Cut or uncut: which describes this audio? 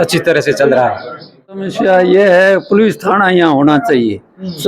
cut